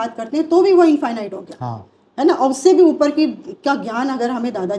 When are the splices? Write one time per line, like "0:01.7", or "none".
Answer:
none